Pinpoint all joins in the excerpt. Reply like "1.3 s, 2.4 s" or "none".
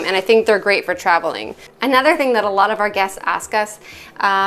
1.6 s